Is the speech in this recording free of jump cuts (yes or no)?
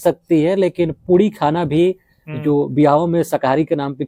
yes